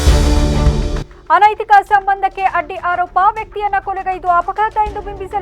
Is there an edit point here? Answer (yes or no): yes